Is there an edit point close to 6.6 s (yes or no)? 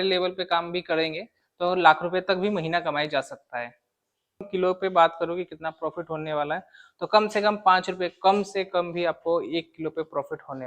no